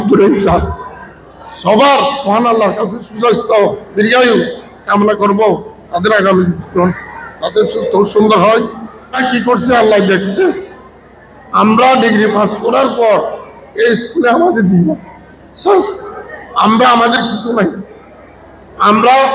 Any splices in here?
yes; 1 cut; at 9.2 s

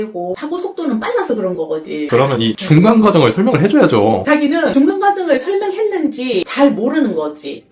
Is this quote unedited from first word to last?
no; 3 cuts; at 2.1 s, 4.7 s, 6.5 s

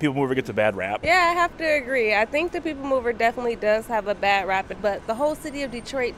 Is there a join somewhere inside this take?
yes; 2 cuts; at 1.0 s, 4.8 s

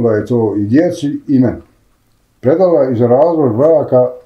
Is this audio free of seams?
yes; 0 cuts

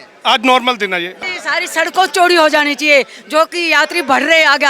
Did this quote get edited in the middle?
yes; 1 cut; at 1.2 s

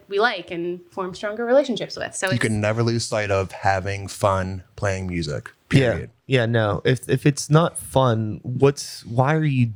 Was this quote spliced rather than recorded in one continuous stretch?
no; 0 cuts

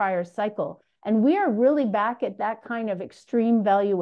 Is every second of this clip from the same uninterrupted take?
yes; 0 cuts

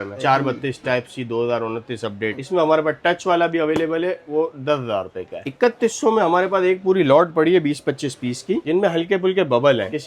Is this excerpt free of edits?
yes; 0 cuts

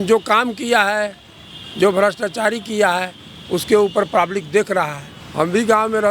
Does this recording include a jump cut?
no; 0 cuts

